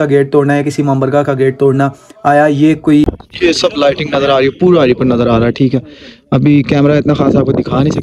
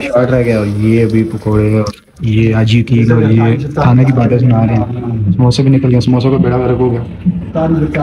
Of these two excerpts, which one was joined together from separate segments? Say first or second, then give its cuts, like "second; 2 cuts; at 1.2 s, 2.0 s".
first; 1 cut; at 3.0 s